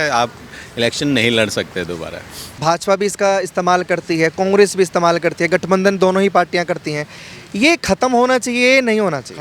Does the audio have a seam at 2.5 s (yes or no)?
yes